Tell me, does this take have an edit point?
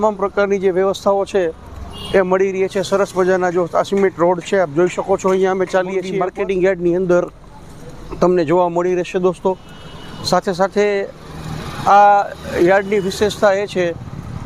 yes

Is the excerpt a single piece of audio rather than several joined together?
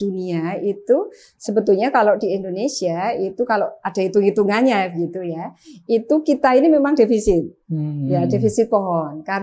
yes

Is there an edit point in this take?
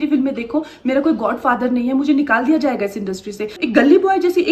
yes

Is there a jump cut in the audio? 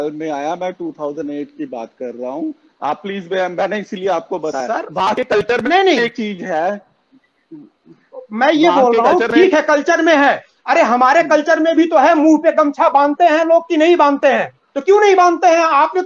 no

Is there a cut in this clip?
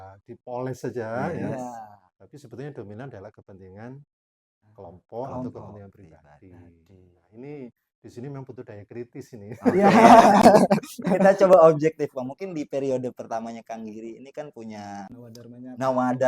yes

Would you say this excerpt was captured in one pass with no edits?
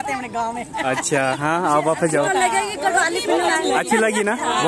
yes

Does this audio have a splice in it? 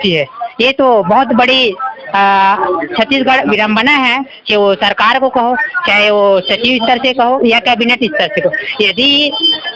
no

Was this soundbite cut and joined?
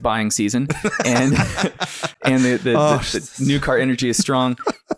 no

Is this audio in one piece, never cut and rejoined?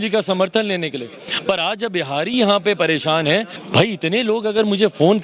no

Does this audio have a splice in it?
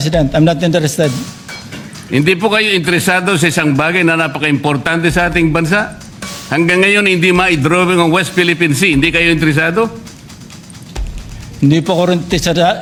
no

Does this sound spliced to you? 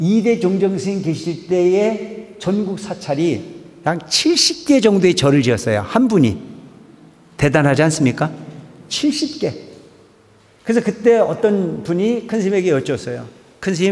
no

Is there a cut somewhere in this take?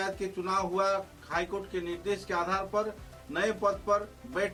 no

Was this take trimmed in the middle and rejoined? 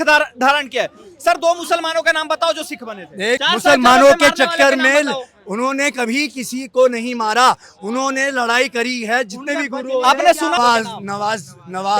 yes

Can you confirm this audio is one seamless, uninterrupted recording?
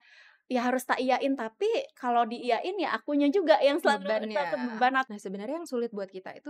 no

